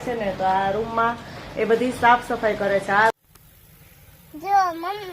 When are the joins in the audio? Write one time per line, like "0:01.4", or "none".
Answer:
0:03.1